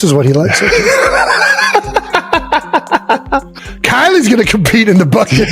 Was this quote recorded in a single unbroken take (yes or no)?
no